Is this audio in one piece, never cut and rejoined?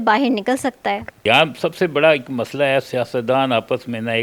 no; 1 cut; at 1.1 s

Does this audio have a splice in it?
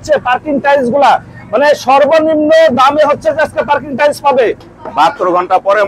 yes; 1 cut; at 4.8 s

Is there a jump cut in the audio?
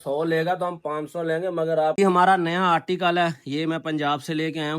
yes; 1 cut; at 2.0 s

